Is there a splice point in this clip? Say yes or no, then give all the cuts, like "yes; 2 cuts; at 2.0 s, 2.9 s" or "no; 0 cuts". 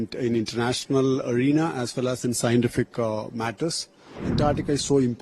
yes; 1 cut; at 4.2 s